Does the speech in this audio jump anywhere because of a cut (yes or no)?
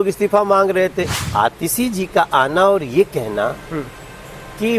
yes